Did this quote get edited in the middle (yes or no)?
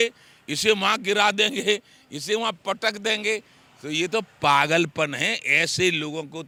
no